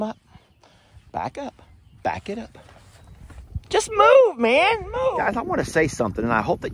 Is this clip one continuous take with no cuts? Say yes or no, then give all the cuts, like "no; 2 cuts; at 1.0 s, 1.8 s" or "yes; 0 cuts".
no; 1 cut; at 5.1 s